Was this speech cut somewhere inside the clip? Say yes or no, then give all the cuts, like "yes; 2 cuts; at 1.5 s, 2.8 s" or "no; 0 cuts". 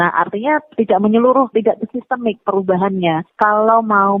yes; 1 cut; at 3.3 s